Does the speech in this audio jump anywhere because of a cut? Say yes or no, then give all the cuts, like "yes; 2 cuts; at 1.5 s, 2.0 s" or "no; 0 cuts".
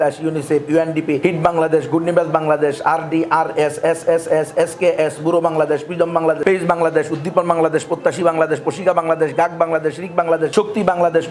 yes; 3 cuts; at 1.2 s, 6.4 s, 10.5 s